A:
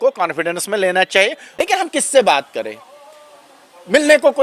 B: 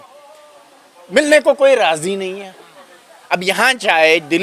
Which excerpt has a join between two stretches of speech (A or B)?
A